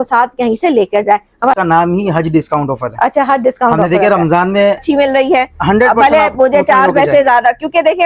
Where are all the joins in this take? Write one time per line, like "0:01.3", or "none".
0:01.6
0:04.8